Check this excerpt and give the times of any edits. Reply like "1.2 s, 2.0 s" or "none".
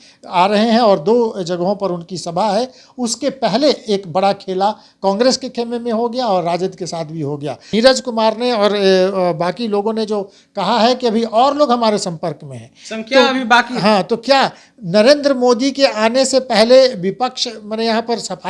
7.6 s